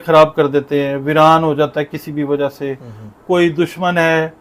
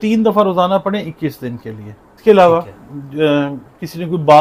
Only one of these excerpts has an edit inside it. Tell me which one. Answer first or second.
second